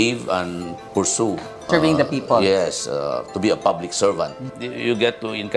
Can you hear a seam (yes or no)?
yes